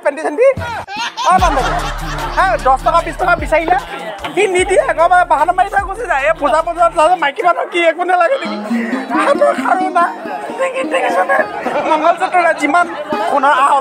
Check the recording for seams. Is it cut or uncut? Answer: cut